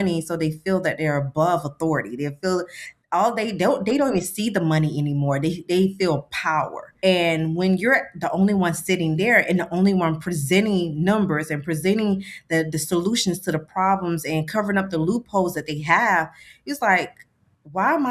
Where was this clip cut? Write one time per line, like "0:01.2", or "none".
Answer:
0:06.8